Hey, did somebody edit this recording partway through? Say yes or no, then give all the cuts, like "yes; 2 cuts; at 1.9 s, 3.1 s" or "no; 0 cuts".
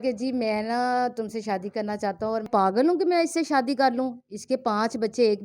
yes; 1 cut; at 2.5 s